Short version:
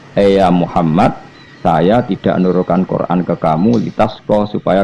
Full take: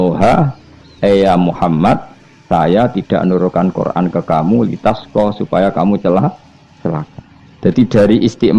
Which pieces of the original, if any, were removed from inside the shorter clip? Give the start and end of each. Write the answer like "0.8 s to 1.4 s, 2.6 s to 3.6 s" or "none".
none